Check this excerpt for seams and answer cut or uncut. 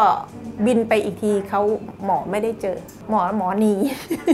cut